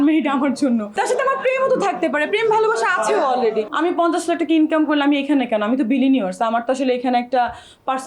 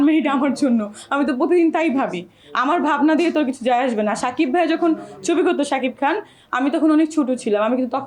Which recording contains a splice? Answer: first; 2 cuts; at 0.9 s, 3.7 s

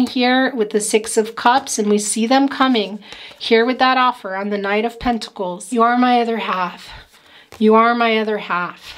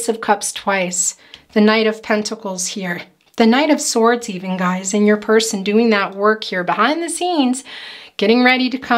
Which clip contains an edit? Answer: first; 1 cut; at 5.6 s

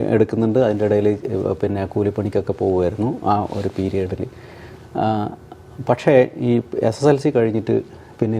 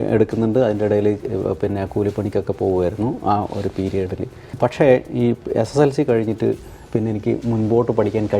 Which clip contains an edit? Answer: second; 1 cut; at 4.4 s

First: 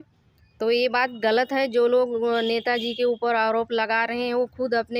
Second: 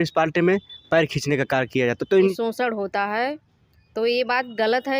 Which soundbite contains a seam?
second; 1 cut; at 2.4 s

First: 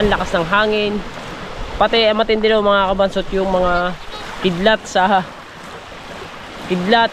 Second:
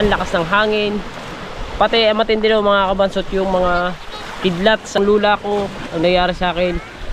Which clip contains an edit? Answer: second; 1 cut; at 5.0 s

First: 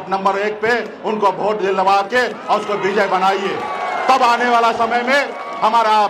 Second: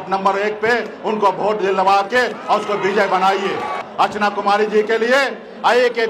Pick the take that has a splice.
second; 1 cut; at 3.8 s

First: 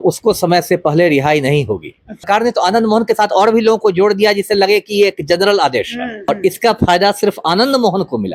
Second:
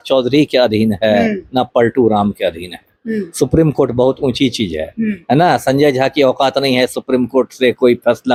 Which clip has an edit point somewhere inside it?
first; 2 cuts; at 2.2 s, 6.3 s

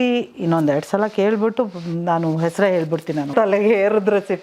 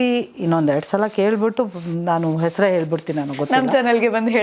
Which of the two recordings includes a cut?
first; 1 cut; at 3.3 s

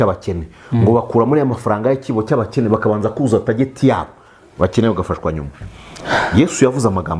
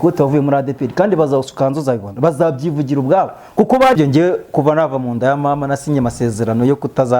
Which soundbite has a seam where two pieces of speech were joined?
second; 1 cut; at 4.0 s

